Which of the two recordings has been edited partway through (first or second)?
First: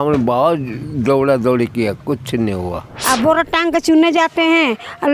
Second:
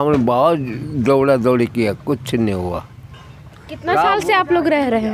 first